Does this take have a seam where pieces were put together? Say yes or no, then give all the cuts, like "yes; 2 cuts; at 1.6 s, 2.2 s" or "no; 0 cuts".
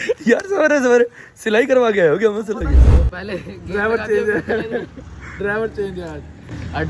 yes; 1 cut; at 2.8 s